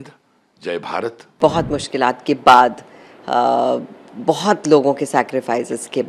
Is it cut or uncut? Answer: cut